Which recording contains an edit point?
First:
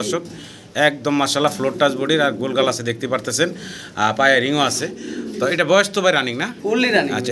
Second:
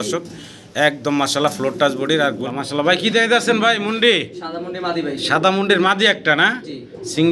second; 1 cut; at 2.4 s

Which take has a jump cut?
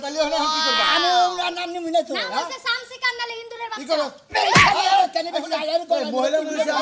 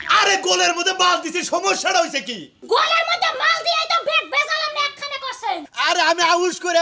second; 1 cut; at 5.7 s

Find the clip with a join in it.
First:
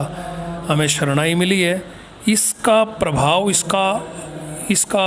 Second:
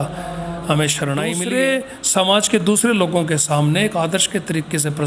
second; 1 cut; at 1.4 s

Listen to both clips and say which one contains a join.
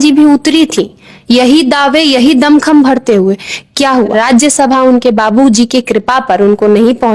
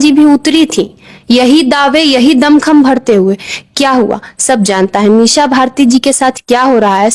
first; 1 cut; at 4.1 s

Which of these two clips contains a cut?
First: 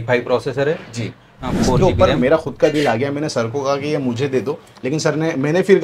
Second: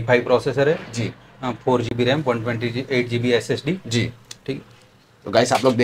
first; 1 cut; at 1.8 s

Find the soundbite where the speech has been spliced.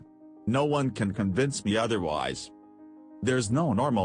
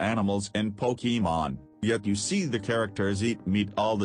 first; 1 cut; at 3.1 s

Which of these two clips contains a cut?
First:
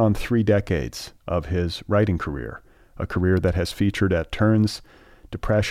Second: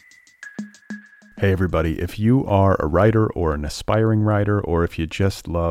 second; 1 cut; at 0.9 s

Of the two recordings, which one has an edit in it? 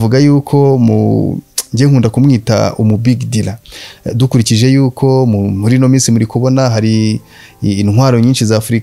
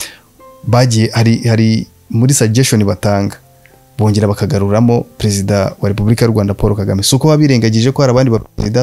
first; 1 cut; at 3.7 s

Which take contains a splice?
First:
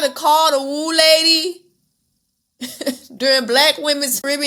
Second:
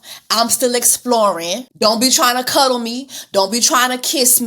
second; 1 cut; at 1.5 s

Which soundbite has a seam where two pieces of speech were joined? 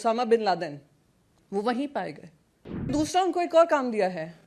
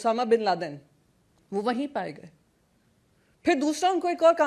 first; 1 cut; at 2.9 s

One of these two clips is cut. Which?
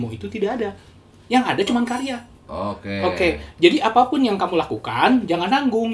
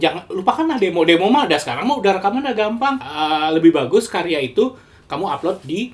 second; 1 cut; at 3.1 s

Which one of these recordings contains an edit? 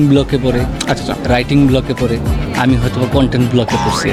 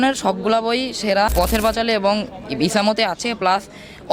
second; 1 cut; at 1.3 s

